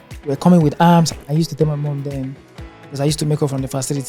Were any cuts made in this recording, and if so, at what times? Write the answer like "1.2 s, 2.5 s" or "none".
1.1 s